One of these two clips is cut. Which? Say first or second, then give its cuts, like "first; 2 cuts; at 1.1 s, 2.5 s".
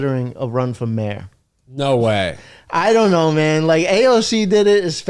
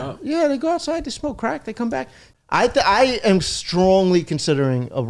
second; 1 cut; at 2.2 s